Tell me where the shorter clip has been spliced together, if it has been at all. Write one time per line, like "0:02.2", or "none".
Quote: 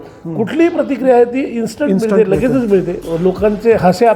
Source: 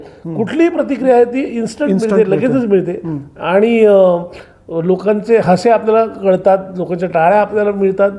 0:03.0